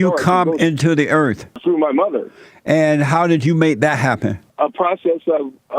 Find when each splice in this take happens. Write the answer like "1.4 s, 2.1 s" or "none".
1.5 s, 4.4 s